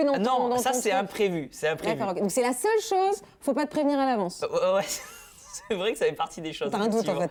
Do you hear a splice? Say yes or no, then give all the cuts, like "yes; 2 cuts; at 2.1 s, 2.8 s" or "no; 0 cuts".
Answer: no; 0 cuts